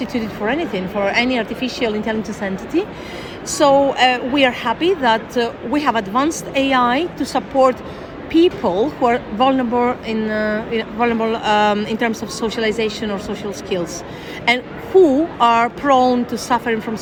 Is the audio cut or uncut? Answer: uncut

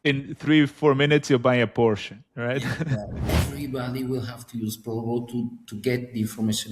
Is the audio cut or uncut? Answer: cut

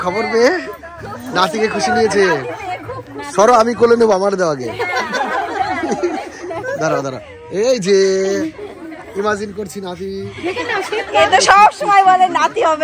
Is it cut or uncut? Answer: uncut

